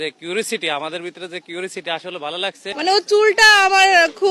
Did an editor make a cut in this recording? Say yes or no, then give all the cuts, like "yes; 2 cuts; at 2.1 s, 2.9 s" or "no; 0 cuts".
yes; 1 cut; at 2.7 s